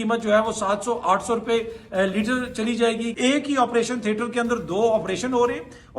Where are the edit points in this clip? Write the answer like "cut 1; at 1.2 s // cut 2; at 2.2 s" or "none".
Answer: cut 1; at 3.1 s